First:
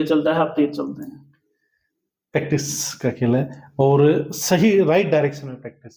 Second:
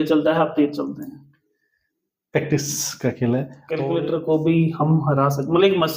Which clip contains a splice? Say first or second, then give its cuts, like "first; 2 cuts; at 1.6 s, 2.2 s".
second; 1 cut; at 3.6 s